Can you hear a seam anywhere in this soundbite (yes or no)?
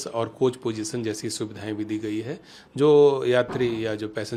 no